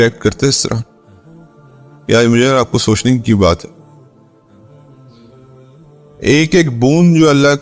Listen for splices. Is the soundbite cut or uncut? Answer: cut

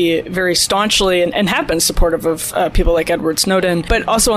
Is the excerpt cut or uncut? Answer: uncut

